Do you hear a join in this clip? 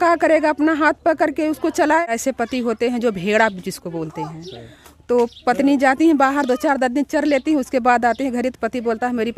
yes; 1 cut; at 2.1 s

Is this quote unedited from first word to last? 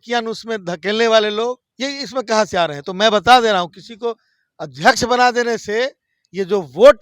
no; 1 cut; at 1.7 s

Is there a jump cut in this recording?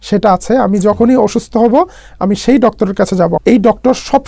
yes; 1 cut; at 3.4 s

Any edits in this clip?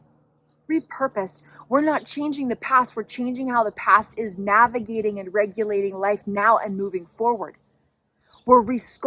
no; 0 cuts

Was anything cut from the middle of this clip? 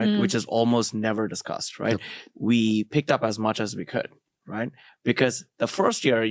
yes; 2 cuts; at 2.2 s, 4.8 s

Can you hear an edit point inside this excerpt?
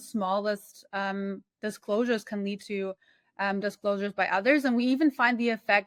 no; 0 cuts

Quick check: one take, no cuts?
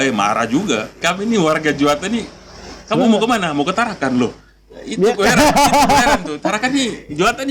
no; 1 cut; at 1.0 s

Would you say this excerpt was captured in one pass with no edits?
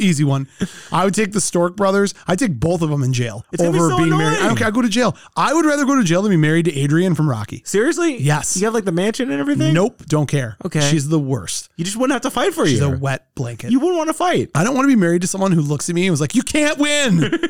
yes; 0 cuts

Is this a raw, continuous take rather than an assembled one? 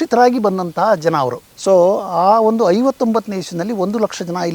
no; 1 cut; at 1.5 s

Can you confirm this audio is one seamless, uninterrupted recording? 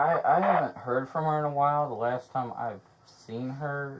yes; 0 cuts

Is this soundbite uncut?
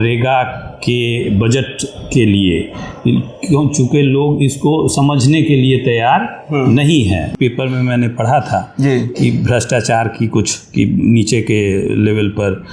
no; 1 cut; at 7.3 s

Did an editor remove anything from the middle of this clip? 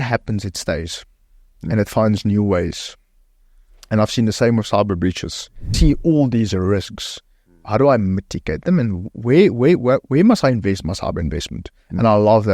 yes; 1 cut; at 5.7 s

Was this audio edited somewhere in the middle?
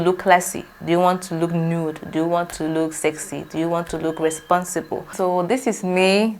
yes; 1 cut; at 5.1 s

